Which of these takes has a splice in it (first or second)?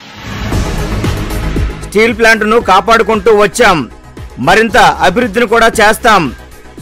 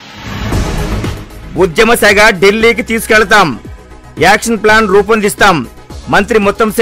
second